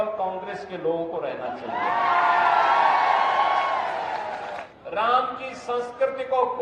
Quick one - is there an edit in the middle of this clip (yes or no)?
yes